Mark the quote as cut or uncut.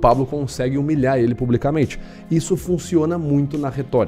uncut